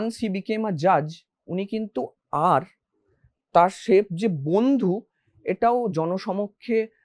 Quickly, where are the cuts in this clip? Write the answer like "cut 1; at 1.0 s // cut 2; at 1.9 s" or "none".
none